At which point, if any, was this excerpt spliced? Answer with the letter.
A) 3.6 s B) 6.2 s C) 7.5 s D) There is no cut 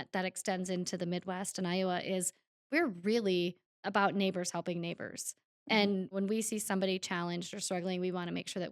B